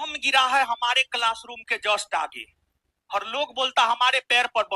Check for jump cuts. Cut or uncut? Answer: uncut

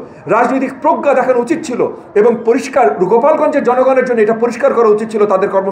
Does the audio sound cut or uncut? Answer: uncut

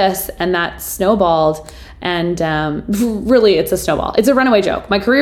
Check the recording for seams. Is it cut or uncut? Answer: uncut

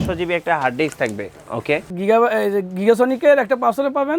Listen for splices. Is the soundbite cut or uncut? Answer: cut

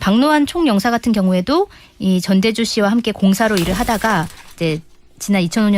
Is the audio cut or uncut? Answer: cut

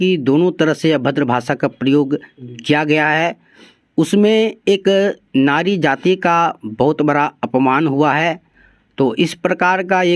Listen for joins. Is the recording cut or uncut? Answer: uncut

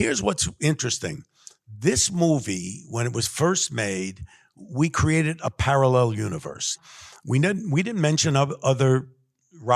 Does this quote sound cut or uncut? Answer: cut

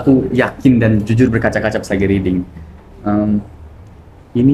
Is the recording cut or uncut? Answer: uncut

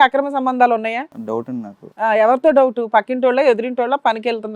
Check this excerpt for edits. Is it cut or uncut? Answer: cut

